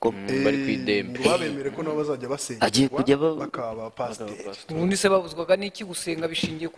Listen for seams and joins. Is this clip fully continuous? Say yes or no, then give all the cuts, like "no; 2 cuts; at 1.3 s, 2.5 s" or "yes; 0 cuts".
yes; 0 cuts